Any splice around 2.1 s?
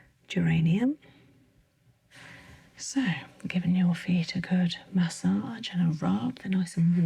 yes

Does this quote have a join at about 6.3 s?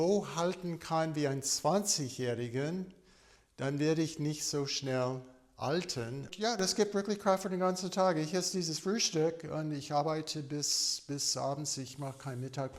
yes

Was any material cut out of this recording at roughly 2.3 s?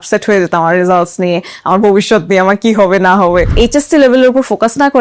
no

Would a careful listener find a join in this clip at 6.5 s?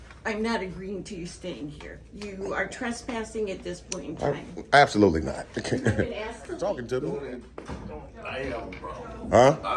yes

